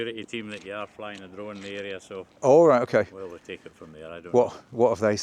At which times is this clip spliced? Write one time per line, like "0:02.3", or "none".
none